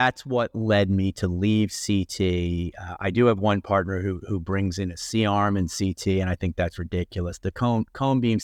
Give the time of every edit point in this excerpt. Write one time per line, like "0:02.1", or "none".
none